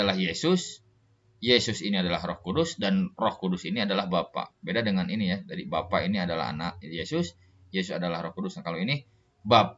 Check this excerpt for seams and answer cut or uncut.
uncut